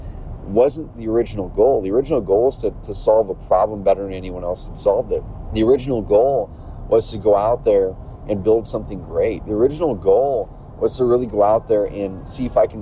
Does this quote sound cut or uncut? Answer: cut